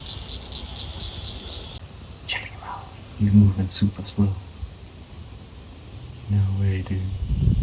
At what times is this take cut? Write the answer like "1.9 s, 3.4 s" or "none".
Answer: 1.7 s